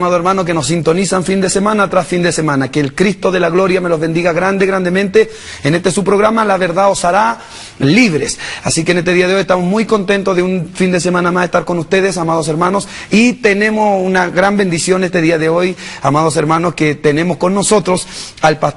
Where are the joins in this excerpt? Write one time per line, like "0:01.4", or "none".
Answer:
none